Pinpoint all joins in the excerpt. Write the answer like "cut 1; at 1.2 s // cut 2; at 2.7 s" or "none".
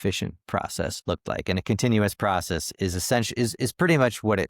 cut 1; at 1.0 s